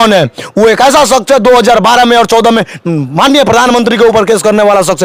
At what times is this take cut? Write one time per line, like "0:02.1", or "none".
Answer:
none

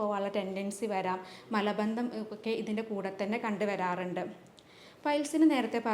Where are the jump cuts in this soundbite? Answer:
none

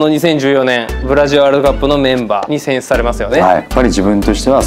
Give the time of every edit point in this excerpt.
0:00.9
0:03.7

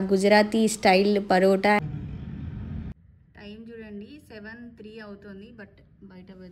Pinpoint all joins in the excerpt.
0:01.8

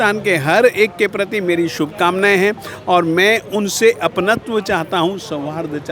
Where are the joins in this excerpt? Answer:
none

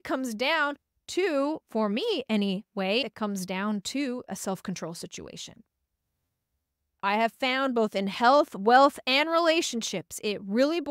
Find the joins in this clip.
0:03.0
0:07.0

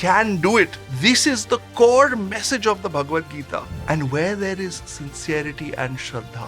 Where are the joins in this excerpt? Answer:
0:01.7
0:03.7

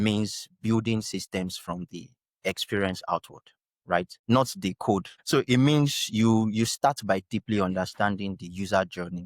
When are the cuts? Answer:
0:04.1
0:05.1

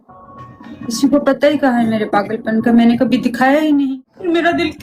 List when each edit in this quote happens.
0:03.9

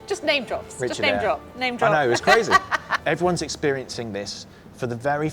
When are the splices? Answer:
0:03.0

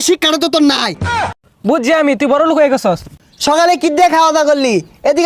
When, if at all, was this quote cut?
0:01.3
0:03.1

